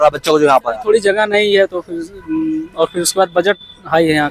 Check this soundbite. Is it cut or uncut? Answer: uncut